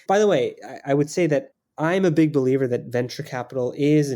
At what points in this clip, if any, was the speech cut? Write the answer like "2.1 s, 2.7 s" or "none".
1.6 s